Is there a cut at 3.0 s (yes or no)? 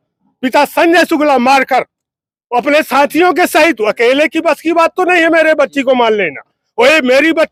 no